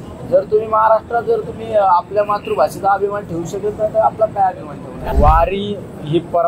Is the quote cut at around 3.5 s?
no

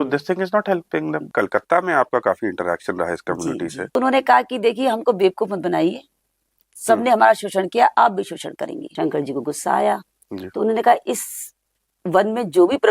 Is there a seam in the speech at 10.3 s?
no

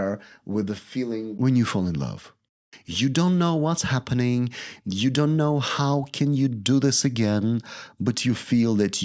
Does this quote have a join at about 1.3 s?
yes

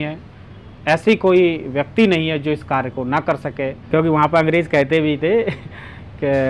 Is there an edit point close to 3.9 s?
yes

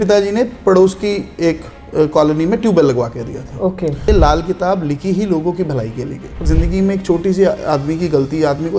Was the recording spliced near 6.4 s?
yes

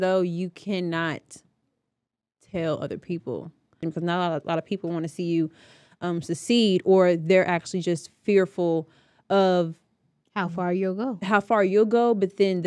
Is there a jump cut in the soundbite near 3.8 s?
yes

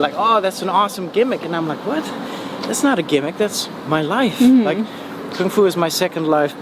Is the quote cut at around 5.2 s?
no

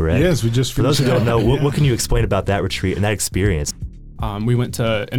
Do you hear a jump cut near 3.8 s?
yes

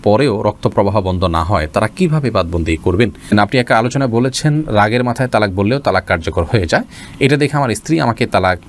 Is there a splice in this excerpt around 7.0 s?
no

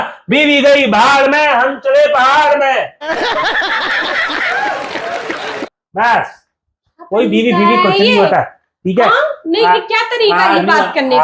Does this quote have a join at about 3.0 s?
no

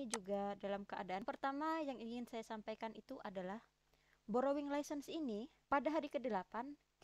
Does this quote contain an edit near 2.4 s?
no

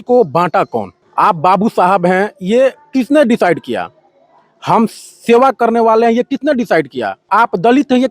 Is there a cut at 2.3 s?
no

